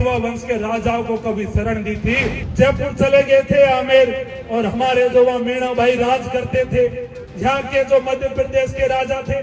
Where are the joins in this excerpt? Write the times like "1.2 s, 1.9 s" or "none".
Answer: 2.4 s